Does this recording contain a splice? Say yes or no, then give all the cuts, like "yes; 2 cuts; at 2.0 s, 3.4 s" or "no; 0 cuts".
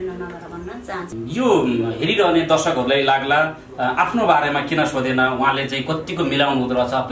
yes; 1 cut; at 1.1 s